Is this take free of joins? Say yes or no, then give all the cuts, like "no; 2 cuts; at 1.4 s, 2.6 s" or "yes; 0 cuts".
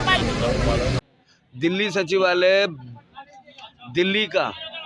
no; 1 cut; at 1.0 s